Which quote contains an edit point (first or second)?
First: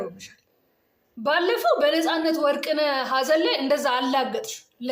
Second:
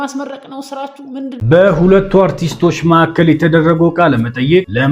second